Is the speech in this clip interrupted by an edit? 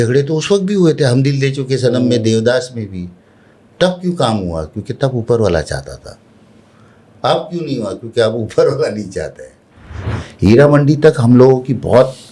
yes; 1 cut; at 10.1 s

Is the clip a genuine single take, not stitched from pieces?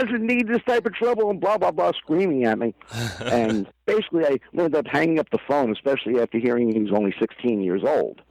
yes; 0 cuts

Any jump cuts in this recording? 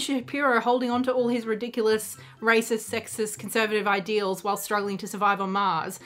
no; 0 cuts

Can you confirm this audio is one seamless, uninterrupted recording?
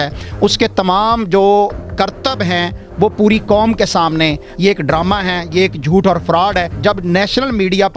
no; 2 cuts; at 4.5 s, 6.7 s

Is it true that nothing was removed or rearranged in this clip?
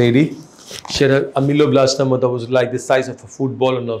yes; 0 cuts

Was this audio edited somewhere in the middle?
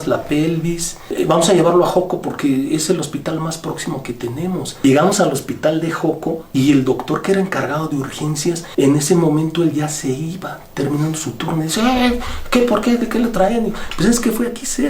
yes; 1 cut; at 0.9 s

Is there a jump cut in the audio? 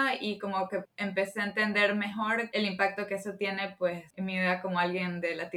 yes; 3 cuts; at 0.9 s, 2.5 s, 4.1 s

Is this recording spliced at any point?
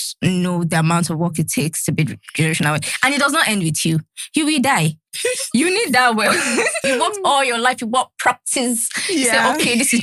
yes; 1 cut; at 6.8 s

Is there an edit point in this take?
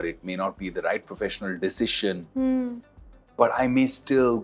no; 0 cuts

